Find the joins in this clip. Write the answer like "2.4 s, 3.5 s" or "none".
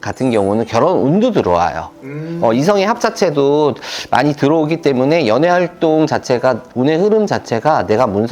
6.7 s